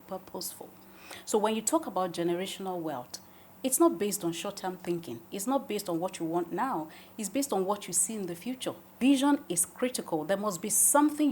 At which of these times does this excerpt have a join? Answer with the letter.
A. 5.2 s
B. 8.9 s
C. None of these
B